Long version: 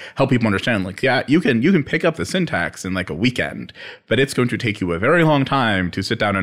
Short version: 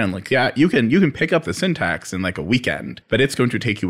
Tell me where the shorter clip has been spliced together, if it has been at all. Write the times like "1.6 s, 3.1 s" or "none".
2.9 s